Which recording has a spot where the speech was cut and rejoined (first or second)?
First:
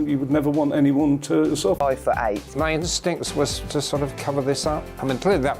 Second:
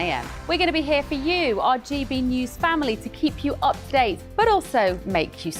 first